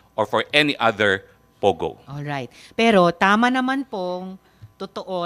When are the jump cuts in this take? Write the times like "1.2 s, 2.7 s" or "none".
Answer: none

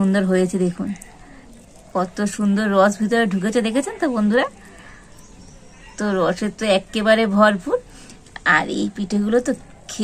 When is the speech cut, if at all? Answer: none

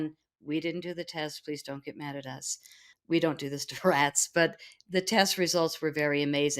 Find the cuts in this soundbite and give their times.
2.9 s

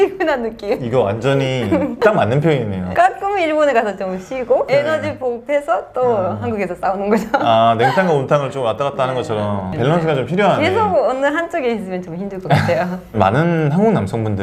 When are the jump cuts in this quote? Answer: none

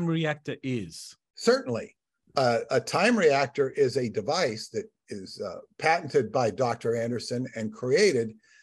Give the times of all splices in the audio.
none

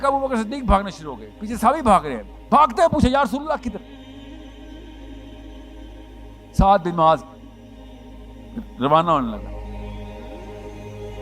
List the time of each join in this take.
3.8 s, 5.9 s, 9.7 s

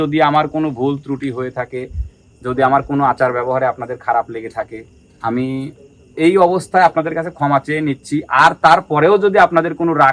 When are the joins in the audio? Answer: none

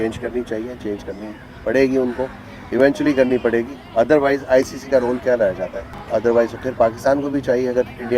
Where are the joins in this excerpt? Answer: 5.9 s

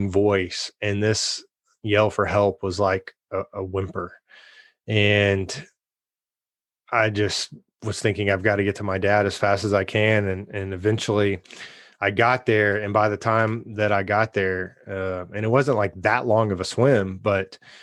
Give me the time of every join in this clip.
none

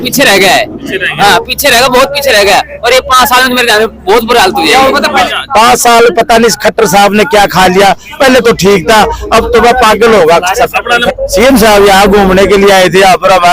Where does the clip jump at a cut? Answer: 5.3 s, 11.1 s

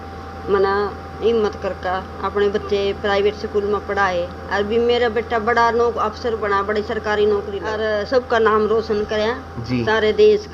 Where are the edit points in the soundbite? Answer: 8.2 s

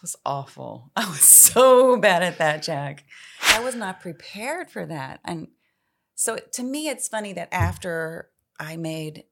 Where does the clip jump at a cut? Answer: 3.4 s

